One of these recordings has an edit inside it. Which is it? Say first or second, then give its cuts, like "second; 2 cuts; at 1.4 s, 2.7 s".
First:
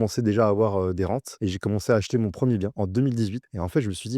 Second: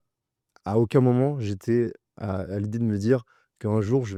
first; 2 cuts; at 1.3 s, 2.9 s